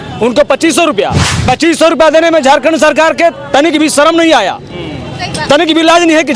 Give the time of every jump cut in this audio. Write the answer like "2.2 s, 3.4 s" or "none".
1.3 s